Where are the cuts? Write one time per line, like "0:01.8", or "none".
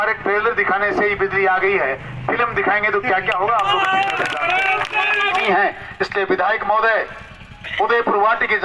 0:05.4